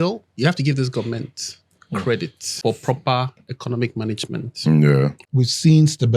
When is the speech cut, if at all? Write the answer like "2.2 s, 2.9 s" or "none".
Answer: 2.5 s, 5.2 s

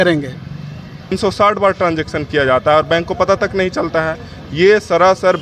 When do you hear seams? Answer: 1.2 s

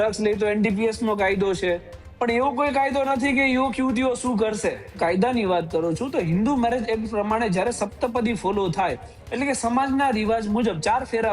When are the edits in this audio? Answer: 5.0 s

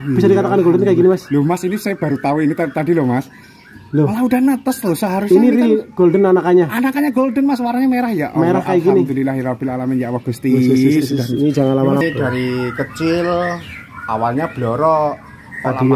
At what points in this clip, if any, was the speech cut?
12.0 s

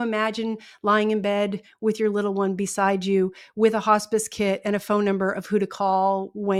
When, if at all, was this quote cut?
none

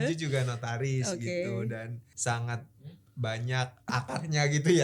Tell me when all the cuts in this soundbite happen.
2.0 s, 3.9 s

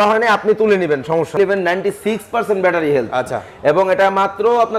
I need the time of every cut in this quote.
1.4 s

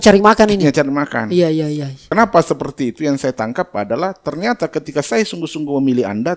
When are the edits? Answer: 2.0 s

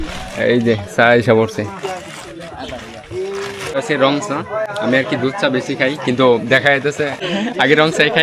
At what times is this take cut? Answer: 3.9 s, 7.3 s

